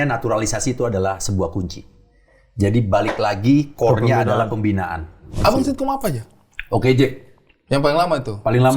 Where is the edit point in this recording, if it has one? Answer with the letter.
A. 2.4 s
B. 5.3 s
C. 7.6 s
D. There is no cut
B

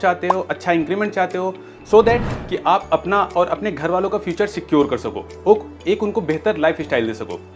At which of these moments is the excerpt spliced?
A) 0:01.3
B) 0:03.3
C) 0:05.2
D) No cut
D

